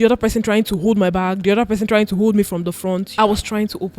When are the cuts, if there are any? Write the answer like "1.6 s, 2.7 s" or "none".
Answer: 3.1 s